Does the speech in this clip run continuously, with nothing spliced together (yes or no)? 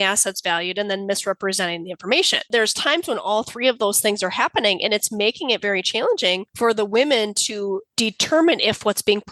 no